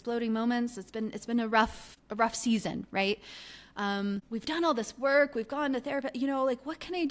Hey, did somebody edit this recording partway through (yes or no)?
no